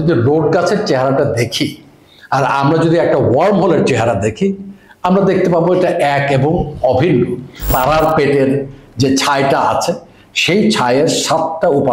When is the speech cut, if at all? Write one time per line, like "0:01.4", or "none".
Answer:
0:07.7

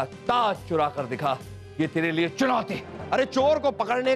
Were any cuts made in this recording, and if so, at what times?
0:01.6
0:02.9

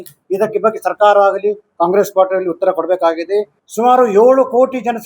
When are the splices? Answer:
0:03.6

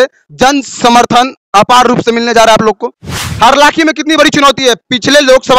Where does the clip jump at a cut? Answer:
0:03.2

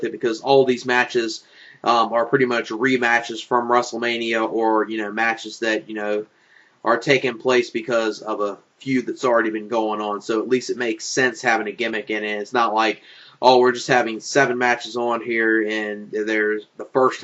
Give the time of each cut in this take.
0:03.4

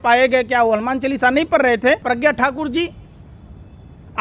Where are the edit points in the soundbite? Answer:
0:02.0

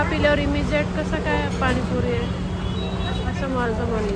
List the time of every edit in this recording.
none

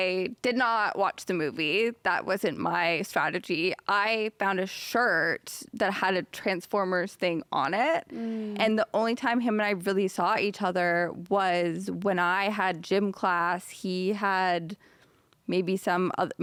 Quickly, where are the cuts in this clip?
none

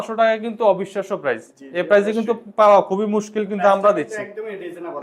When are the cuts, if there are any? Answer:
none

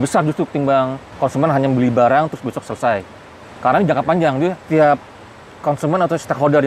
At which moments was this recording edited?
0:01.0
0:04.6

